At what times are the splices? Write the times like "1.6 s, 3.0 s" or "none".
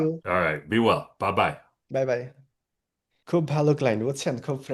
none